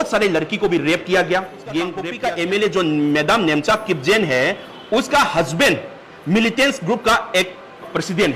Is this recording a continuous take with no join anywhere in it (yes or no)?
no